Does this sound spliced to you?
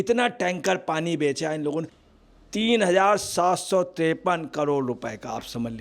yes; 1 cut; at 2.0 s

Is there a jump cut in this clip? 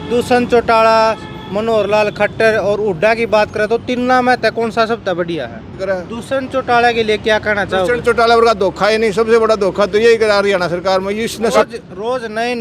yes; 2 cuts; at 5.8 s, 11.5 s

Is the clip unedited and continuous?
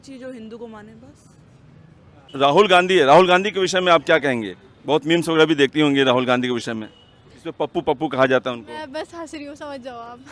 no; 1 cut; at 2.3 s

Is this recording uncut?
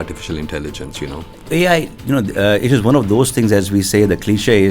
no; 1 cut; at 1.5 s

